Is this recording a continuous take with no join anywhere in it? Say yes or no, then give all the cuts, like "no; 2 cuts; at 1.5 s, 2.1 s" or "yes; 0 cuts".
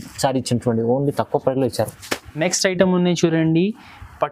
yes; 0 cuts